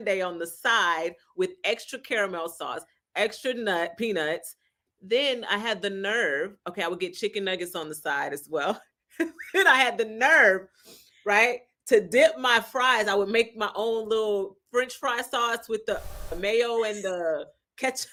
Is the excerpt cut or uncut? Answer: uncut